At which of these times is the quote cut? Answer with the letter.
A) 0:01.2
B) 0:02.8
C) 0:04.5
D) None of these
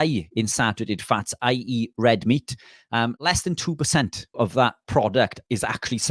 C